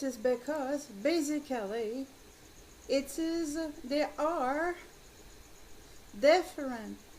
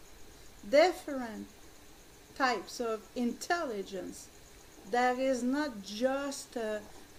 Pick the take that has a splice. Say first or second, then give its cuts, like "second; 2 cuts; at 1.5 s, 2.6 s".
first; 1 cut; at 3.5 s